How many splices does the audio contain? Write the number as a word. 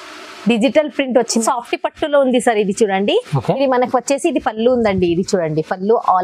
one